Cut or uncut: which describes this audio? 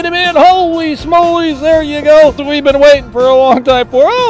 cut